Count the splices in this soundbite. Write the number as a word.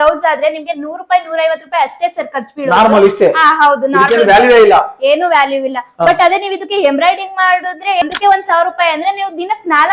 one